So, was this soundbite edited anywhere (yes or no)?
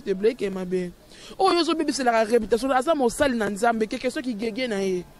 no